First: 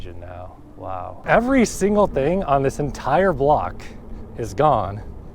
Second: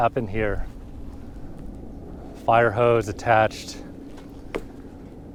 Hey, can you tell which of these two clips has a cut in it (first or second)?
first